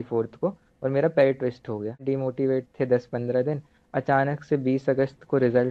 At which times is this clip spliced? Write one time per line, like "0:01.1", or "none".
0:02.0